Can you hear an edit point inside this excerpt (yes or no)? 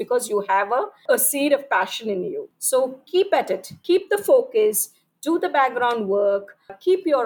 yes